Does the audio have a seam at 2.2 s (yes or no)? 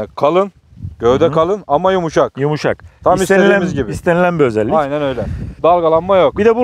no